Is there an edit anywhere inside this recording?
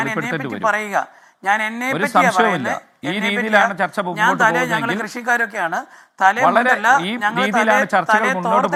no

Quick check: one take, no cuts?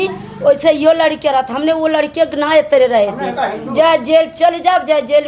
yes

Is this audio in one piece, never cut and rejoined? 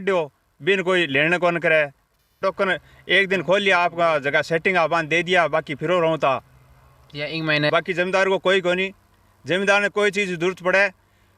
no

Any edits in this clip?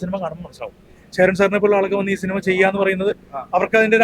no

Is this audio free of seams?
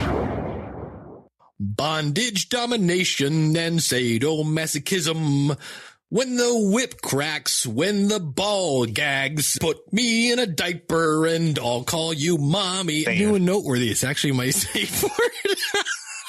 no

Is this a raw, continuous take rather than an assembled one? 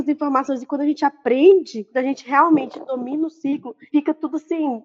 yes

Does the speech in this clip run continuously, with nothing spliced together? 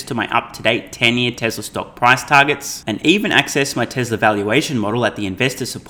yes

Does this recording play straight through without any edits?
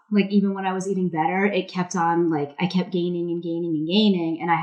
yes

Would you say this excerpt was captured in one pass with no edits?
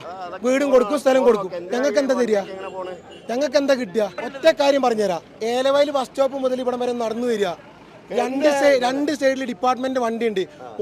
no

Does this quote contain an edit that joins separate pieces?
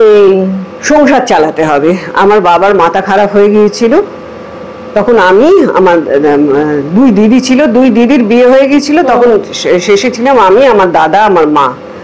no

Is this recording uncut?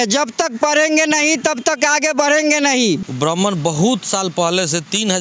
no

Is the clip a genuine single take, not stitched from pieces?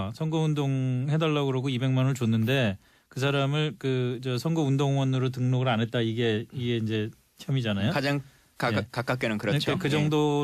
yes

